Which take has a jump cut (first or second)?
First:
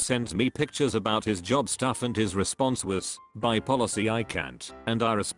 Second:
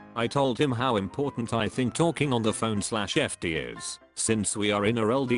first